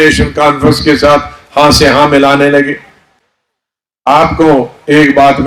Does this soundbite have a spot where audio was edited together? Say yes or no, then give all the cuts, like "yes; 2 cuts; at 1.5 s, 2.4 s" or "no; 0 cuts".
no; 0 cuts